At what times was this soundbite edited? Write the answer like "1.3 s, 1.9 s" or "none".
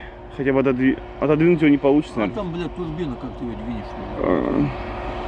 none